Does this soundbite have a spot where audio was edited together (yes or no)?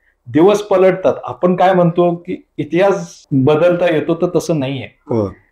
yes